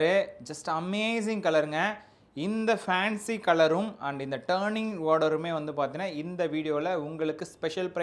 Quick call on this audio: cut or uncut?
uncut